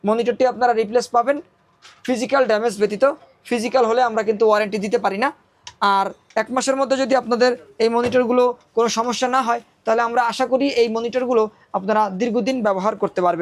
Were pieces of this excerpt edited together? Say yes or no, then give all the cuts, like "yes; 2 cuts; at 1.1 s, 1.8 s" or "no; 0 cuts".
no; 0 cuts